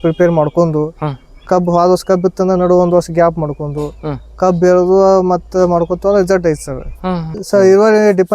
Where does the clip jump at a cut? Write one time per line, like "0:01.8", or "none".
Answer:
0:07.4